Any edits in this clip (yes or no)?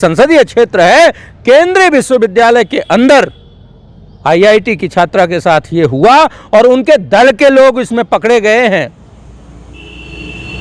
no